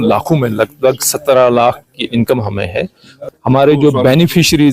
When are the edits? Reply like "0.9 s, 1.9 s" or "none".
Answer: 3.2 s